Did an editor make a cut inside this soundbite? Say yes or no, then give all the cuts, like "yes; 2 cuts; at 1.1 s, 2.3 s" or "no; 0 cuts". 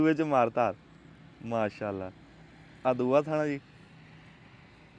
no; 0 cuts